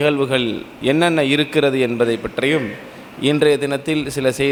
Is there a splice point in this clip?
no; 0 cuts

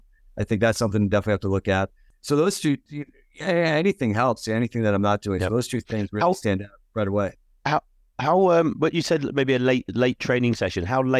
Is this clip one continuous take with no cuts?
yes; 0 cuts

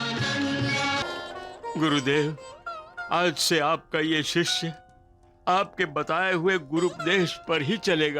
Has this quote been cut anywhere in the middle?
yes; 1 cut; at 1.0 s

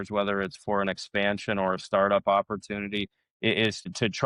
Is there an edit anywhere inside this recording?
no; 0 cuts

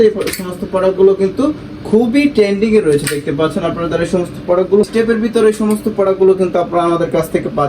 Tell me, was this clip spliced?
yes; 1 cut; at 4.9 s

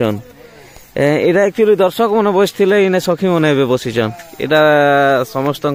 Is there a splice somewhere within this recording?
no; 0 cuts

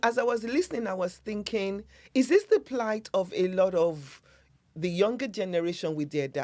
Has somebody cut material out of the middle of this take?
no; 0 cuts

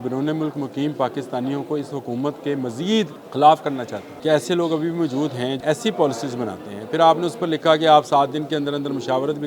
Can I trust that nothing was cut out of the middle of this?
no; 3 cuts; at 3.2 s, 4.0 s, 5.6 s

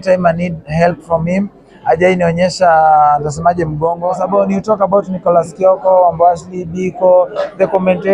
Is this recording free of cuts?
no; 1 cut; at 4.1 s

